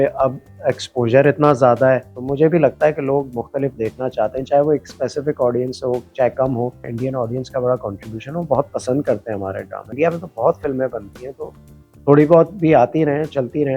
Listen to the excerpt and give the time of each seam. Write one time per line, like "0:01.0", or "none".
0:02.2
0:06.9
0:09.9

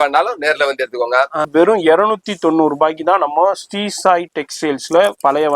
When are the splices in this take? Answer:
0:01.5

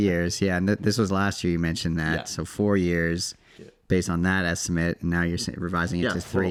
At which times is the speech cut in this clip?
none

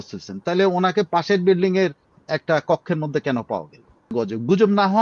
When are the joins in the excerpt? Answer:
0:04.1

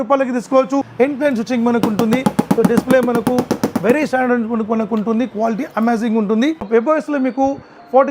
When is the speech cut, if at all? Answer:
0:00.9
0:06.7

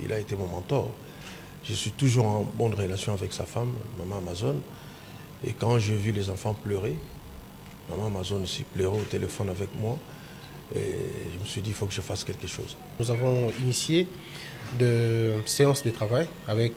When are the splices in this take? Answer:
none

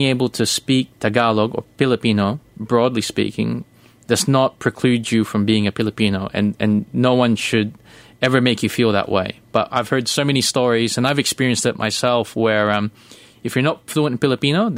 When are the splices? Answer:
none

